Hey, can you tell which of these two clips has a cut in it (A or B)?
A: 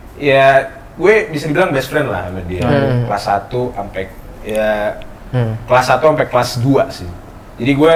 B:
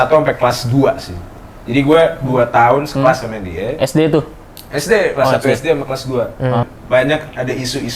B